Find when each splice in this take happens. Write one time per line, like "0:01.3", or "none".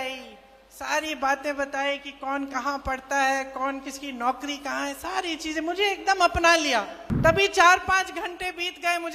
0:07.0